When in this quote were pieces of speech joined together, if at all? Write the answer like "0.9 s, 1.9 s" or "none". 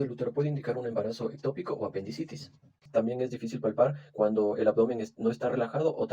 2.9 s